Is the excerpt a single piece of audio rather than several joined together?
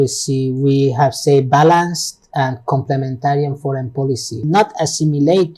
no; 1 cut; at 4.4 s

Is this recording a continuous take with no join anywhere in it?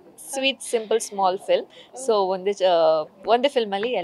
yes; 0 cuts

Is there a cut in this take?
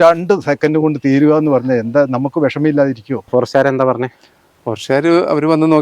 yes; 1 cut; at 3.1 s

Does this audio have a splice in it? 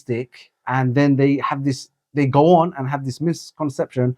no; 0 cuts

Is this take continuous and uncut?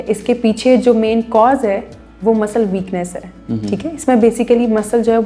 yes; 0 cuts

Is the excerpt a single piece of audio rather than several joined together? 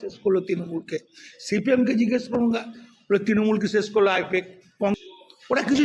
no; 1 cut; at 4.9 s

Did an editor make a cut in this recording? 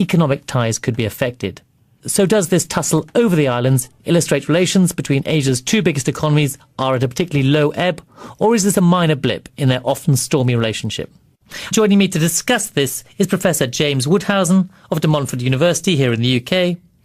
yes; 1 cut; at 3.4 s

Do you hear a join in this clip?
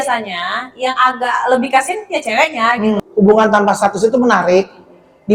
yes; 1 cut; at 3.0 s

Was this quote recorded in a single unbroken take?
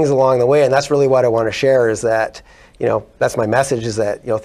yes; 0 cuts

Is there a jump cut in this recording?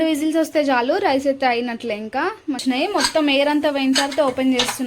yes; 1 cut; at 2.6 s

